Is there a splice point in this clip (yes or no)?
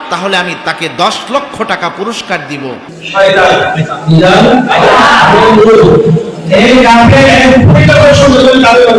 no